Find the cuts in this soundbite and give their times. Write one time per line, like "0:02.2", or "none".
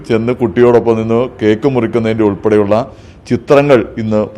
none